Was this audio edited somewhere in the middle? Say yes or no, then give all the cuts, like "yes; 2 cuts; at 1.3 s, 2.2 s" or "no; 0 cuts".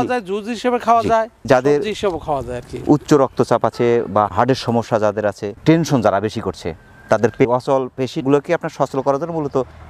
yes; 1 cut; at 7.6 s